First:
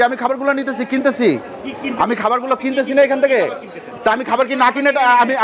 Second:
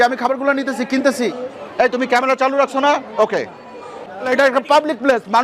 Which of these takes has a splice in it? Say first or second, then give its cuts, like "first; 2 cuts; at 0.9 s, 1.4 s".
second; 2 cuts; at 1.3 s, 4.3 s